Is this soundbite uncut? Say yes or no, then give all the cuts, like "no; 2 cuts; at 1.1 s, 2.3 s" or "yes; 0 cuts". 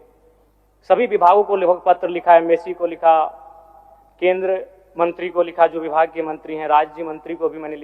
yes; 0 cuts